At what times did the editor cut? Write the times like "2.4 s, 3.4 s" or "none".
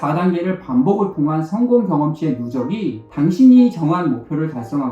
3.0 s